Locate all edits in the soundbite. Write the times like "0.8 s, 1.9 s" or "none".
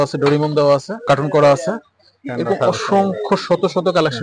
1.0 s